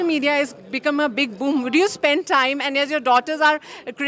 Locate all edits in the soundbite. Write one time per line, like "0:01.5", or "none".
none